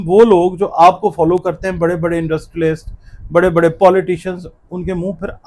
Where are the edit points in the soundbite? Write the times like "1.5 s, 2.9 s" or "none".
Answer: none